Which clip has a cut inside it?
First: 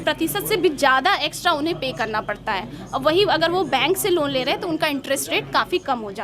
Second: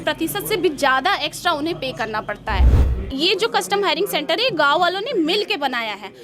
second; 1 cut; at 2.9 s

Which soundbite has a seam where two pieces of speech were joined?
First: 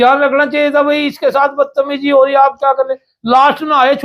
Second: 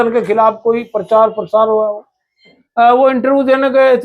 second; 1 cut; at 2.6 s

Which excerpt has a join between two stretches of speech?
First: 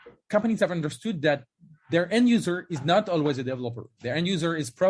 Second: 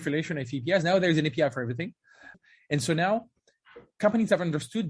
second; 1 cut; at 2.4 s

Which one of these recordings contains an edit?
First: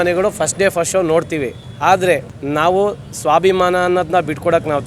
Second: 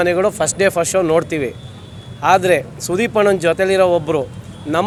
first; 2 cuts; at 1.6 s, 2.3 s

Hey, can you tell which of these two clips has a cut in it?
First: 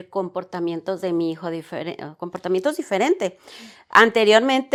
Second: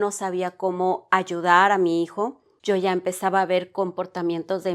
second; 1 cut; at 2.5 s

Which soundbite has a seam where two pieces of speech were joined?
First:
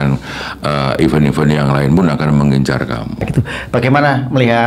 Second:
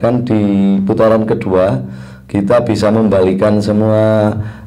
first; 1 cut; at 3.3 s

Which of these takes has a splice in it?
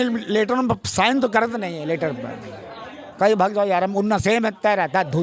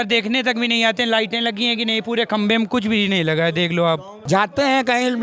second; 1 cut; at 4.1 s

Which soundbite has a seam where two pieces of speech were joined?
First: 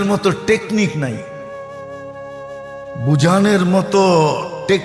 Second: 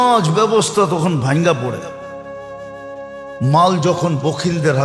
second; 2 cuts; at 1.9 s, 3.3 s

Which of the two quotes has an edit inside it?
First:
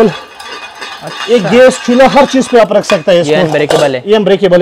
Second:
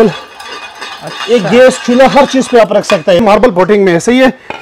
second; 1 cut; at 3.2 s

